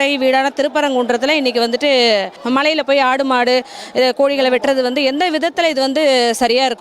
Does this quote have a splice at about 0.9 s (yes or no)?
no